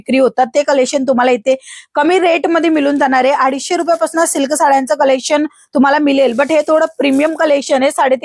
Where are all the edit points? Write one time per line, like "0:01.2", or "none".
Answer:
none